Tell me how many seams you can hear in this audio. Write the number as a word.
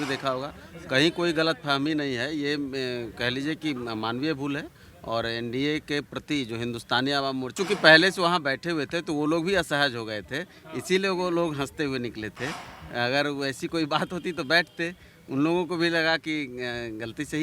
one